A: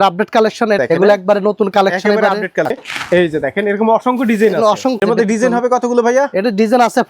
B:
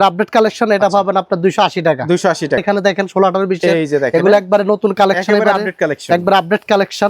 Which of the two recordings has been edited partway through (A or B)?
A